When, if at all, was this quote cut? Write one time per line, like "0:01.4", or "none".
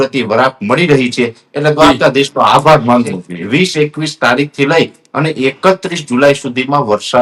0:03.3